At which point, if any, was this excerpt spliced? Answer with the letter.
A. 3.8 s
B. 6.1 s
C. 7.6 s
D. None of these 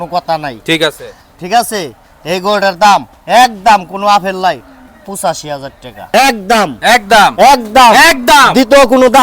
B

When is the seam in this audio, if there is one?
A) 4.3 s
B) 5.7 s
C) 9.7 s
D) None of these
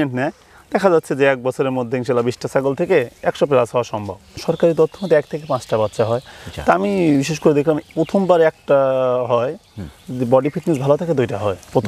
A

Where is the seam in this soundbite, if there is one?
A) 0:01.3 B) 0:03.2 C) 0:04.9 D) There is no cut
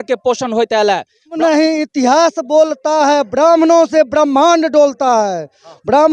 A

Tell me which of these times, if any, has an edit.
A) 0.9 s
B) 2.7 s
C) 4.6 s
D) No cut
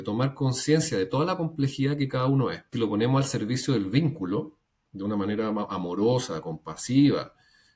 B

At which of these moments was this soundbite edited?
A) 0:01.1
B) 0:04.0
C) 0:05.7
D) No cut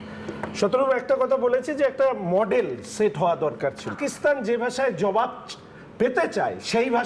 B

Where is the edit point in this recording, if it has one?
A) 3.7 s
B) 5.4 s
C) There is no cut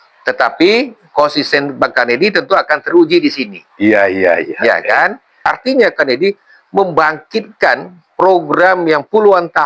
B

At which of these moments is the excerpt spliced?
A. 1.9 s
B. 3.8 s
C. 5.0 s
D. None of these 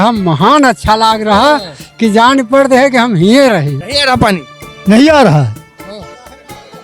B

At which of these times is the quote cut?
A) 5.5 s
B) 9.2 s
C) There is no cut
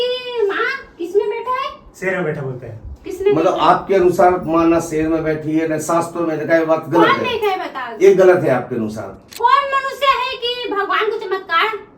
B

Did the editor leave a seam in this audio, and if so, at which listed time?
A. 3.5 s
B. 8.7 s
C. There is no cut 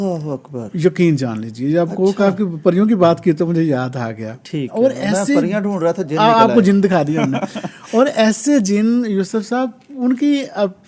C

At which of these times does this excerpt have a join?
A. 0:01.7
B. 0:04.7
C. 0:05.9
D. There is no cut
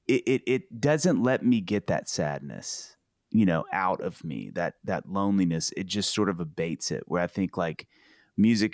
A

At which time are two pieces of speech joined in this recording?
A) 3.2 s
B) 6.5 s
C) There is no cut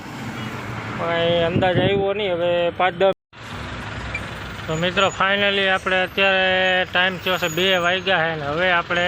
A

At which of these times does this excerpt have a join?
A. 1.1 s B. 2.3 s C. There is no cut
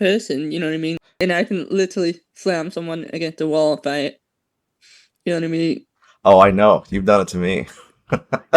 A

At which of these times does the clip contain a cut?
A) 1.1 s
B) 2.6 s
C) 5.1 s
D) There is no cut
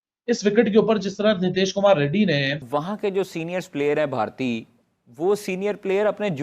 B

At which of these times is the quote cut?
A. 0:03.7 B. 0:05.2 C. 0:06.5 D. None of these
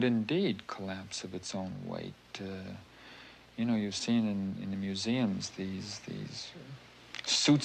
A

